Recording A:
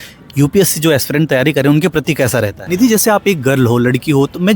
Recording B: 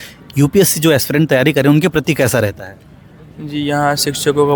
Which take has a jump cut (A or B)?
A